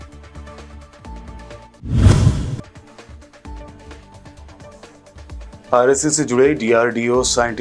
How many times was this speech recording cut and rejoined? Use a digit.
1